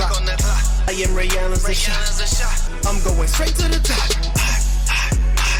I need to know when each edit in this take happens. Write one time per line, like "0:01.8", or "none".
none